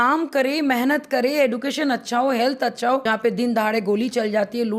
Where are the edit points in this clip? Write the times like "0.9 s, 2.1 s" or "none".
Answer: 3.0 s